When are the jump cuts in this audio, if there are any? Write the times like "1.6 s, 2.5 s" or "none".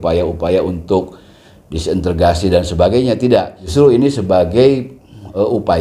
3.6 s